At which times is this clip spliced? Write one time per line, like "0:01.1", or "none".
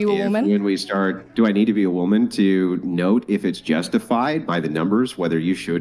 0:01.3